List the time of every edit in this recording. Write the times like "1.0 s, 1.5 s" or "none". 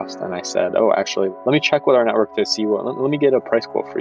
1.3 s